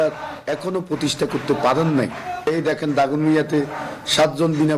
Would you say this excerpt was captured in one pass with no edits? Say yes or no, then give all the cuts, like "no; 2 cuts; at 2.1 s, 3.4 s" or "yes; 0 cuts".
no; 1 cut; at 2.5 s